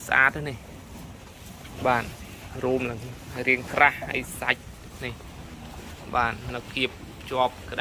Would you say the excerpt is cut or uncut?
uncut